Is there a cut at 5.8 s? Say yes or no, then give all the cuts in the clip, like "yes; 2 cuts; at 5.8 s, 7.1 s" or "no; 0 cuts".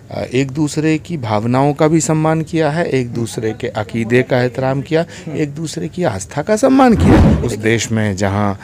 no; 1 cut; at 7.3 s